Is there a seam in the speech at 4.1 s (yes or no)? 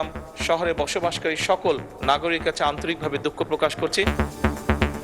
yes